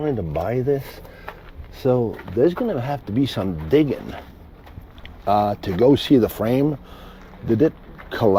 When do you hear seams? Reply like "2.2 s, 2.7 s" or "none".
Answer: none

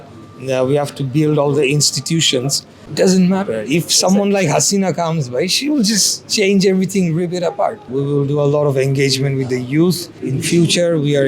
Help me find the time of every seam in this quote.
7.9 s, 10.1 s

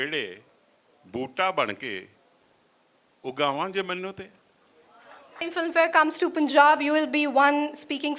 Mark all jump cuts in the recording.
5.5 s

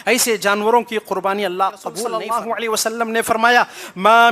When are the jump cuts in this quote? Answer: 2.0 s

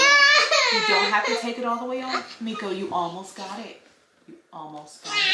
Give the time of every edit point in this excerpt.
none

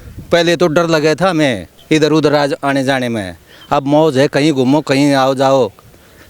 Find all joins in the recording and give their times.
1.7 s

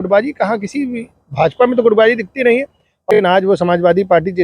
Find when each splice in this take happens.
3.1 s

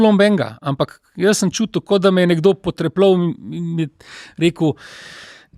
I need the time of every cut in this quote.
none

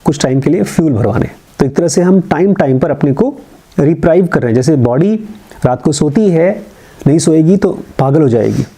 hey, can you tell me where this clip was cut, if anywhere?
1.4 s

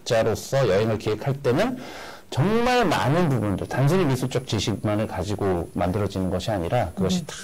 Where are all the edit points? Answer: none

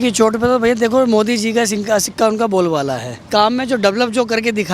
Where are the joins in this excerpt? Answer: 3.3 s

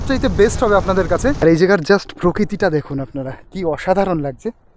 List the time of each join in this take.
1.4 s

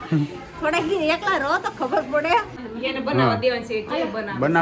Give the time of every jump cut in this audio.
2.5 s

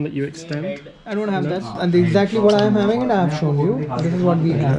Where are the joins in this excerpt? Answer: none

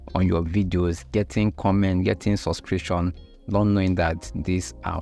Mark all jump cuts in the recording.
none

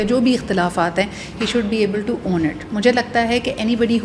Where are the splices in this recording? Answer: none

